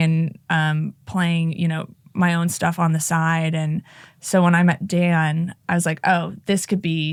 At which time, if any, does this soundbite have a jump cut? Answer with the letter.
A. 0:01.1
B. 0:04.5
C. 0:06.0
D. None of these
D